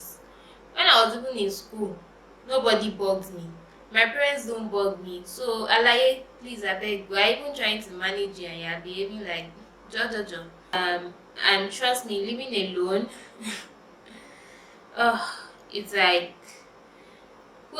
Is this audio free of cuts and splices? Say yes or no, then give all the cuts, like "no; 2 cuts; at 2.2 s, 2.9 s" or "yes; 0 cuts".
no; 1 cut; at 10.7 s